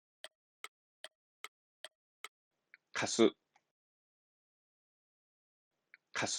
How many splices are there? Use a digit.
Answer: 1